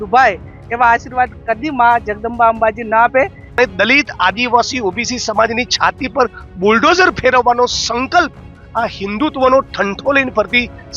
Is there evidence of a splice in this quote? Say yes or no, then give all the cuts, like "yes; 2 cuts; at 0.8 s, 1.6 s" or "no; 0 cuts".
yes; 1 cut; at 3.6 s